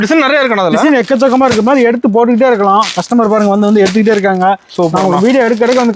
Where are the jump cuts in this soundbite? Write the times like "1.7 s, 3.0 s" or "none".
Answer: none